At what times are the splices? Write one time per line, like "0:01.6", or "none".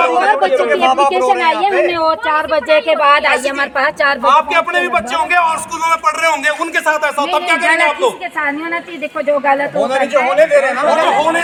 none